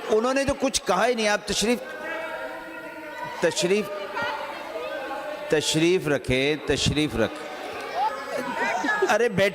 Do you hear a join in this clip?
yes; 1 cut; at 8.1 s

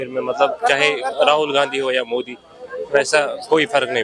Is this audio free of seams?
yes; 0 cuts

